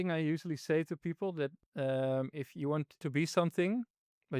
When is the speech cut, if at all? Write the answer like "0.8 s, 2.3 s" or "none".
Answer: 3.0 s